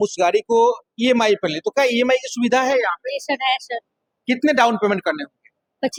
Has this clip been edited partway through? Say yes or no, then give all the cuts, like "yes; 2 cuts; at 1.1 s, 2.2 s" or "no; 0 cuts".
no; 0 cuts